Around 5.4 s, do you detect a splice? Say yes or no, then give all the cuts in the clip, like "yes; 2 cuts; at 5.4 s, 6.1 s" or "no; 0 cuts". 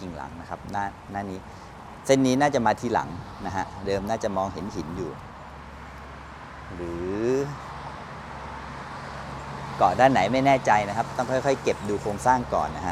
no; 0 cuts